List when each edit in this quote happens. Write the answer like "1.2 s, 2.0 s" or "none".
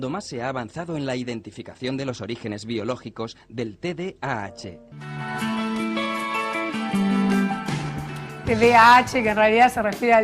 6.1 s